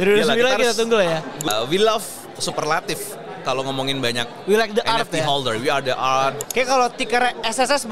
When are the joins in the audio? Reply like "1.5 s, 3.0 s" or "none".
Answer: 1.3 s, 6.4 s